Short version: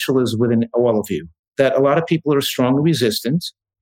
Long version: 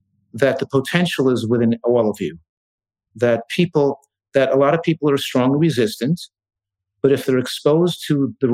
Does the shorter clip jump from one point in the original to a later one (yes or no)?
yes